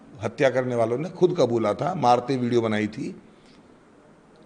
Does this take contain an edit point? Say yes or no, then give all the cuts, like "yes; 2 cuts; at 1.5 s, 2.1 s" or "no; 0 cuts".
no; 0 cuts